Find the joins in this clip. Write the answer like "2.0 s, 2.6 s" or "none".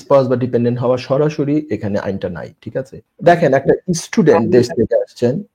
3.0 s